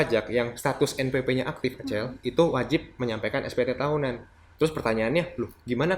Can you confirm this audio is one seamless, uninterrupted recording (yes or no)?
yes